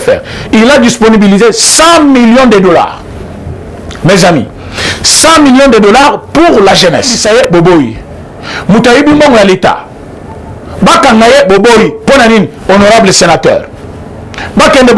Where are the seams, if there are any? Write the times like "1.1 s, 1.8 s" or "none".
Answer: 7.2 s

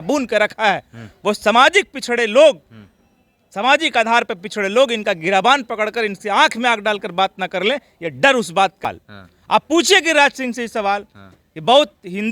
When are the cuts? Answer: 9.0 s

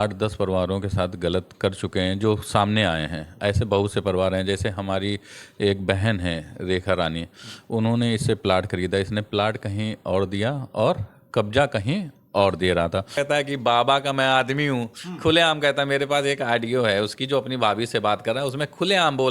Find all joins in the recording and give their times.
13.1 s

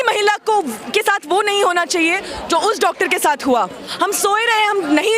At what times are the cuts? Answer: 3.8 s

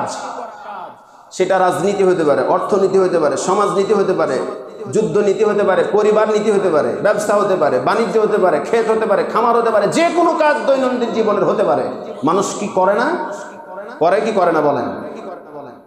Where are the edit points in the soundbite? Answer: none

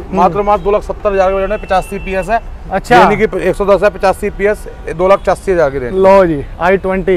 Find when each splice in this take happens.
none

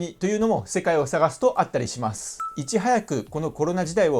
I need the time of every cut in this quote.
2.5 s

